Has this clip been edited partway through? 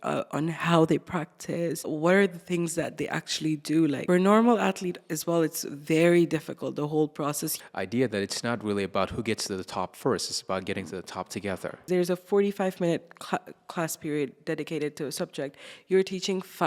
yes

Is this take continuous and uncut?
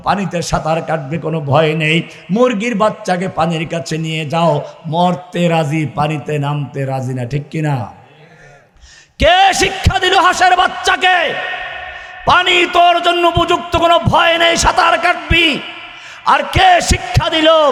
yes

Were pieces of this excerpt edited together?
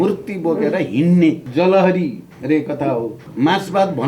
yes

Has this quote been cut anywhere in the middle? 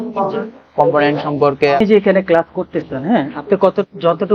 yes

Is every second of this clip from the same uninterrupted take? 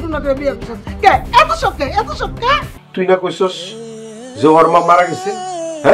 no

